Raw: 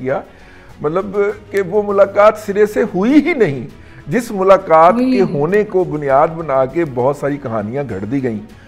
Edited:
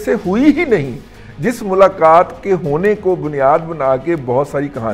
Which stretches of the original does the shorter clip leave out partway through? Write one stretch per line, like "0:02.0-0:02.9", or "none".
none